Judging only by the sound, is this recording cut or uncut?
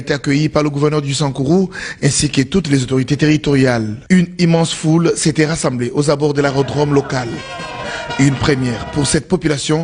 uncut